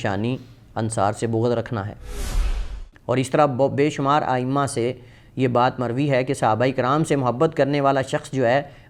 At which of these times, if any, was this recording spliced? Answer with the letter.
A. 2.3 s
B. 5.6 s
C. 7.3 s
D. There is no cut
A